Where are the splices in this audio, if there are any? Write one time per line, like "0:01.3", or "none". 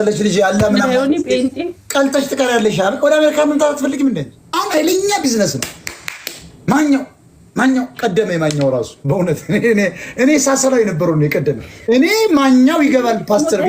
0:04.5

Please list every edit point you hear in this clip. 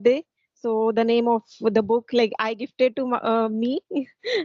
none

